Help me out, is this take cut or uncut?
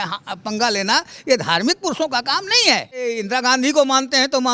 cut